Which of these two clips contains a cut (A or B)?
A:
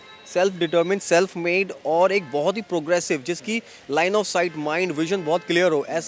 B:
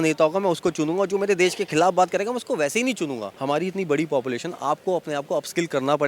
B